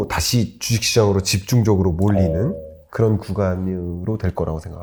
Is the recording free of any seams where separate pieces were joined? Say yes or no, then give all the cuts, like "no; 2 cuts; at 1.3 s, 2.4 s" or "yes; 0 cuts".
yes; 0 cuts